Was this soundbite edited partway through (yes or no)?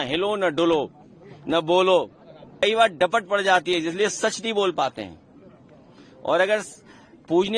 yes